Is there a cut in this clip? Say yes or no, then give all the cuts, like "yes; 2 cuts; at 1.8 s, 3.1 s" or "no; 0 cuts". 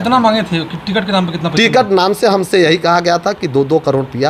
no; 0 cuts